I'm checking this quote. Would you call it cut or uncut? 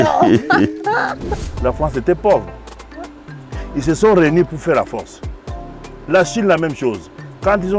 cut